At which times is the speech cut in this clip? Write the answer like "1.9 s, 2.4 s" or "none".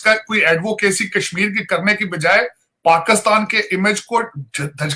none